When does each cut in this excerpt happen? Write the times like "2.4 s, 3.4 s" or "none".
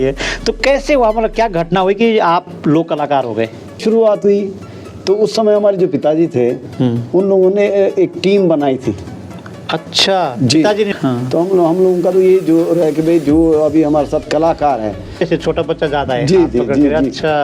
3.8 s, 10.9 s, 15.2 s